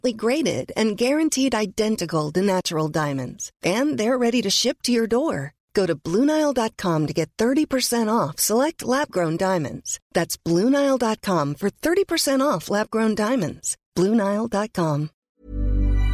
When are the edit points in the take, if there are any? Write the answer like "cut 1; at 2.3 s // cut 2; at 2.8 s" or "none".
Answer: cut 1; at 15.2 s